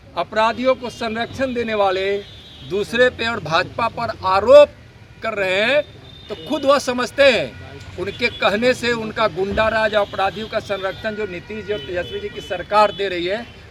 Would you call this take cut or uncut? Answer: uncut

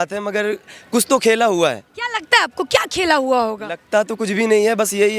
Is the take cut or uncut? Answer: uncut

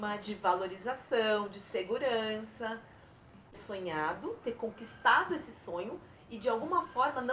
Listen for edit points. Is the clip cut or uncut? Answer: cut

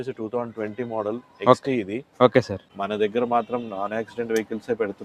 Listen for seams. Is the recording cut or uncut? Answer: cut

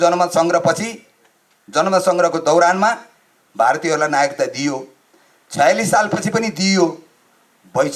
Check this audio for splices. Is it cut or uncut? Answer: uncut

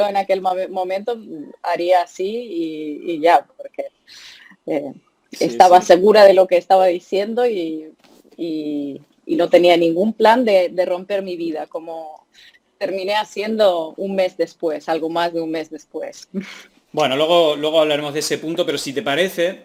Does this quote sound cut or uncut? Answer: uncut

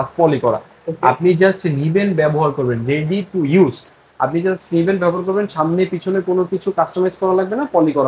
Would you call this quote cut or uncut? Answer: uncut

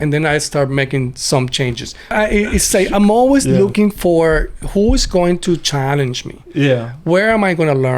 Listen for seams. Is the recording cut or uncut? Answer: cut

